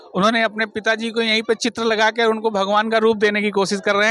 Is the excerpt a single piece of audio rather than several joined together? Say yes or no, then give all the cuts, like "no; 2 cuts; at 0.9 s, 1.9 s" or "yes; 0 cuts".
yes; 0 cuts